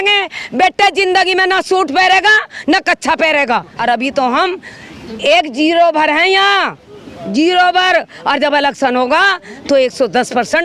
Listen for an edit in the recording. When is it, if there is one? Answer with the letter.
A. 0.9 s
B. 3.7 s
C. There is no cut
B